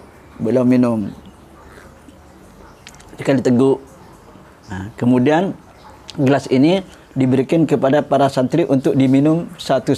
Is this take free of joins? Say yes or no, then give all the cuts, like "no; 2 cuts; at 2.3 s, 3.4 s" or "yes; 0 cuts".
yes; 0 cuts